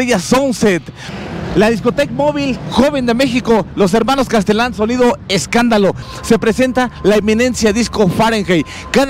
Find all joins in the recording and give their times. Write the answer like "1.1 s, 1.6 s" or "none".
1.1 s, 6.1 s